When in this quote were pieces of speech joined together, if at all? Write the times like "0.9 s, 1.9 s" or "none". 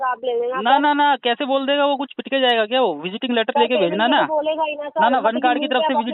none

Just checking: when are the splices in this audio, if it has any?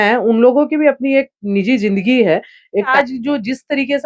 2.9 s

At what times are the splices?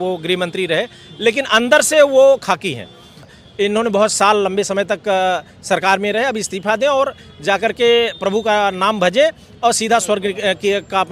3.2 s

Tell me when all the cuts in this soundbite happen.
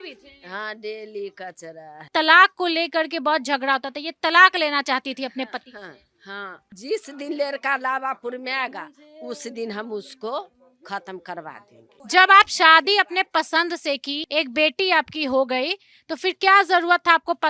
2.1 s, 6.7 s, 12.0 s

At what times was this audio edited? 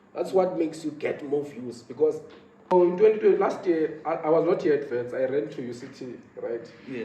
2.7 s

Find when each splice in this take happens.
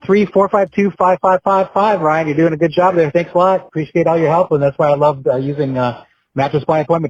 none

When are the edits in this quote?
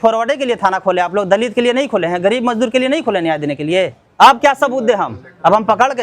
4.0 s

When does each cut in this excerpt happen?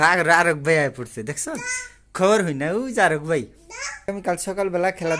4.1 s

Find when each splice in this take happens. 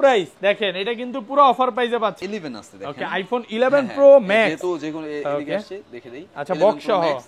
2.2 s

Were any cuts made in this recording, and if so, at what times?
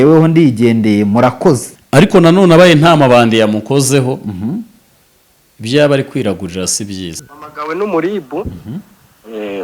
1.7 s, 7.1 s

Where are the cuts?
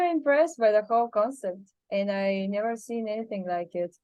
none

